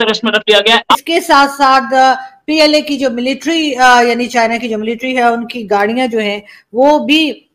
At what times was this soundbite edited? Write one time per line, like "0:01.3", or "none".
0:01.0